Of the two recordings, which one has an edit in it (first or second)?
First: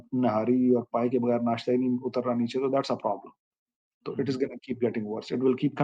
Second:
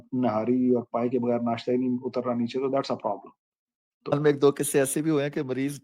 second